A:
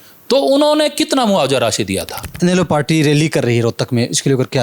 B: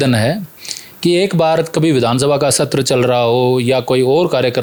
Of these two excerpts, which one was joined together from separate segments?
A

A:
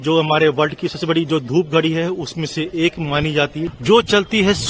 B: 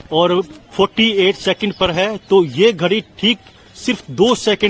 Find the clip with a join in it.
A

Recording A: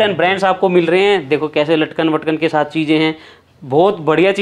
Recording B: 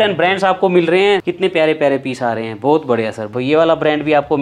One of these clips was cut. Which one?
B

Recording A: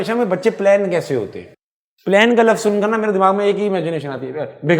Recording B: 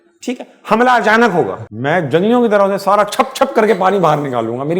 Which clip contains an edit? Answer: B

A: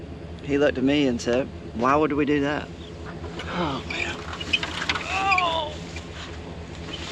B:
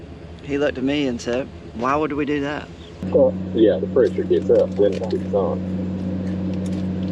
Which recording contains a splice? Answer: B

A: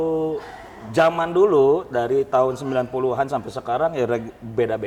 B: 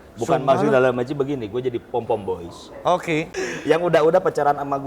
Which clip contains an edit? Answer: B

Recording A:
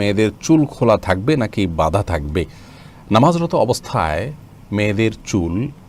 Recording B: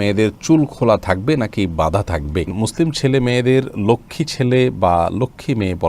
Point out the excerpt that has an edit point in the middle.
B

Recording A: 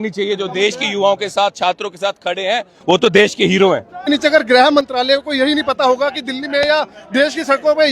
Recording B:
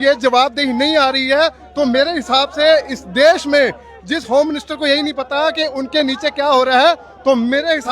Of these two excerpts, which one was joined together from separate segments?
A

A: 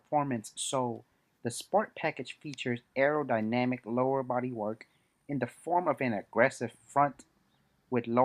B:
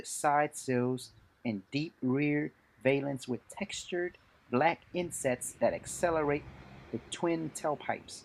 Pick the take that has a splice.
A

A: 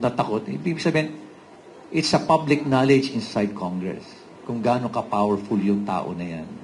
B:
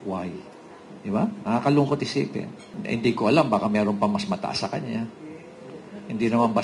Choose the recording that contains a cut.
B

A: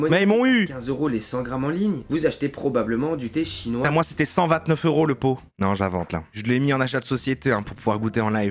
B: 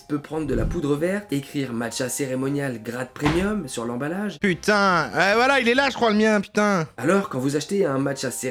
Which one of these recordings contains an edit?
A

